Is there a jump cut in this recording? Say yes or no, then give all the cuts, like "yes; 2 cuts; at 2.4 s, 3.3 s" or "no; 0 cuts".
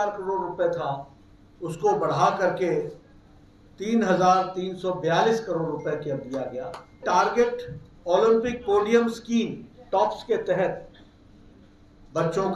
yes; 1 cut; at 7.0 s